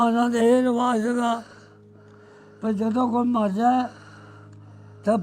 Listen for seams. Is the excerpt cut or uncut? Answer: uncut